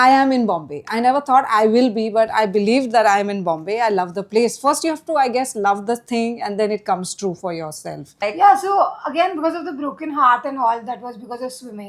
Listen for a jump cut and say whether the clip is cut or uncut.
cut